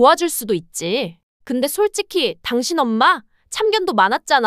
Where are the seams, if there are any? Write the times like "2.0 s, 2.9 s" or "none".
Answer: 1.2 s